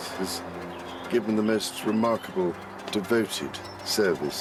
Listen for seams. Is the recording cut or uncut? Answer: uncut